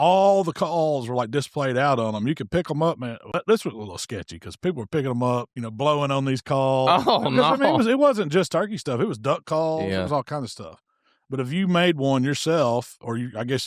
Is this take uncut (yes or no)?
no